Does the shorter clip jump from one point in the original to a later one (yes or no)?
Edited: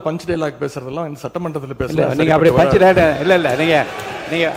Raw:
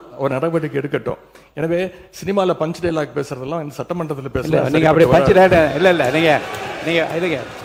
no